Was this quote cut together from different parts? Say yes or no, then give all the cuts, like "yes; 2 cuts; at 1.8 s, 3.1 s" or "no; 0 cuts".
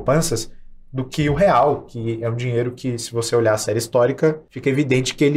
yes; 1 cut; at 4.5 s